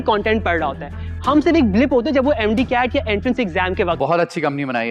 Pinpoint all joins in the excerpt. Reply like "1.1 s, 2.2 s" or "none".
4.0 s